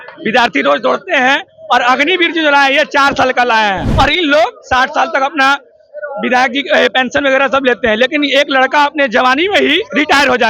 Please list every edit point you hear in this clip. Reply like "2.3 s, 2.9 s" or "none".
3.8 s